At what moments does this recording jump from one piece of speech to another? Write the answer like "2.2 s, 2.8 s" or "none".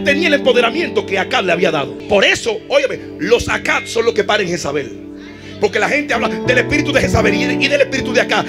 1.9 s